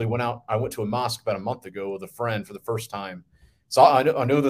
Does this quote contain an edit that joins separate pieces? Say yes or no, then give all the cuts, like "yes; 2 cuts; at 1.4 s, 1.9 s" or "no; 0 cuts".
no; 0 cuts